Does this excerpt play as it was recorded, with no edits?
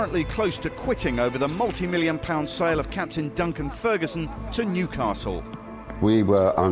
no; 1 cut; at 5.6 s

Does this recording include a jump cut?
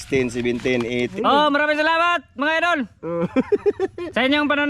yes; 1 cut; at 1.1 s

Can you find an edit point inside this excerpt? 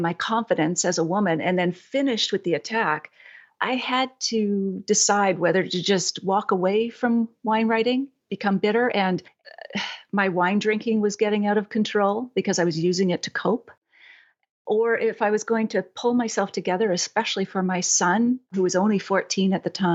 no; 0 cuts

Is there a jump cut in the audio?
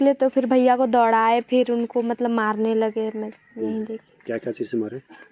no; 0 cuts

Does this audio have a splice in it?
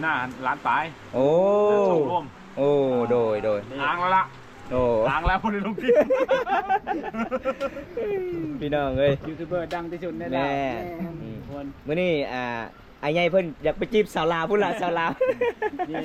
no; 0 cuts

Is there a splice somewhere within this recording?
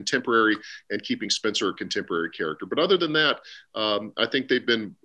no; 0 cuts

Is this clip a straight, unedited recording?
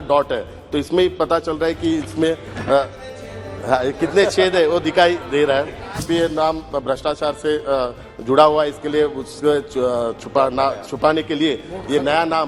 no; 1 cut; at 6.0 s

